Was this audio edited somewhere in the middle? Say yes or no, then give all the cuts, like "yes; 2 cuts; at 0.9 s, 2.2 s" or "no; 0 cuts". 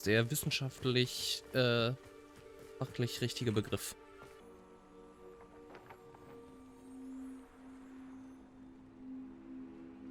no; 0 cuts